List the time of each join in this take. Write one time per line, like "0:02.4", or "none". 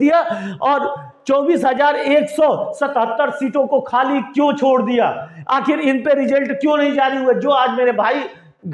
none